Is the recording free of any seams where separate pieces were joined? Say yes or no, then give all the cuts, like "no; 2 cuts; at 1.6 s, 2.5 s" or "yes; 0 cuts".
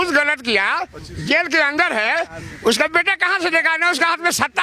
yes; 0 cuts